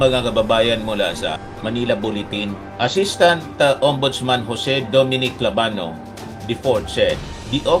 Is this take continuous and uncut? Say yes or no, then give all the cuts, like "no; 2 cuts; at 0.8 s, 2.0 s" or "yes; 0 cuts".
yes; 0 cuts